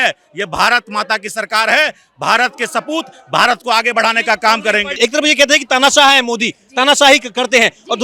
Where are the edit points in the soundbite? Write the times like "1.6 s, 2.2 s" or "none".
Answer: 4.9 s